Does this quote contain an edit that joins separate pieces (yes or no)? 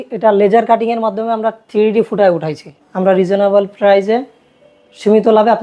yes